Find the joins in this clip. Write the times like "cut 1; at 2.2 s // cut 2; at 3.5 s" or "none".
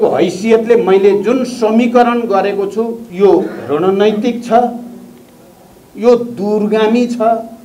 cut 1; at 3.0 s